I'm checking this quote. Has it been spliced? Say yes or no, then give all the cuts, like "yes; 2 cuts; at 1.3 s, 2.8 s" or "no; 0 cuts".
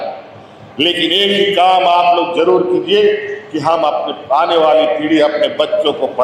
no; 0 cuts